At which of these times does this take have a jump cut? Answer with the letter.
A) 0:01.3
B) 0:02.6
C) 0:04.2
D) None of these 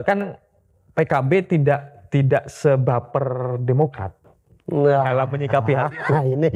D